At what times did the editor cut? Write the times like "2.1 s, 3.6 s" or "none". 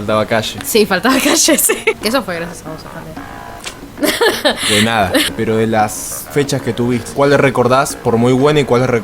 2.0 s, 5.3 s, 7.1 s